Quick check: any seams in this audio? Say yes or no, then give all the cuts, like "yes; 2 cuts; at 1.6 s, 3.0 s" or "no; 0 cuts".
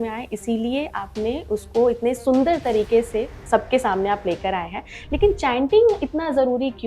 yes; 1 cut; at 3.4 s